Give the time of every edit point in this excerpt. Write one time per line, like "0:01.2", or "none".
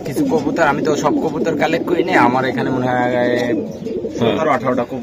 none